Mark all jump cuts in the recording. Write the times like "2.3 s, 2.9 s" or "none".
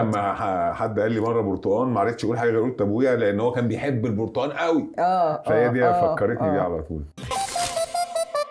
7.3 s